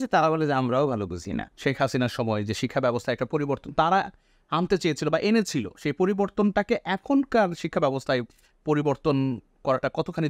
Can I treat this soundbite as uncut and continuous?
no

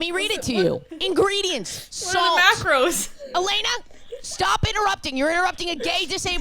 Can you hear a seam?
yes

